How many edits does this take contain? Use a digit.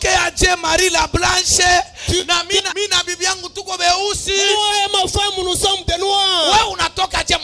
1